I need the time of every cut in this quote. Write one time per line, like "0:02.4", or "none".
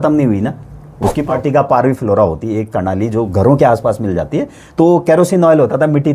0:01.2